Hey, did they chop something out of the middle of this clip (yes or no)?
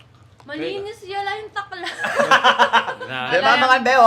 no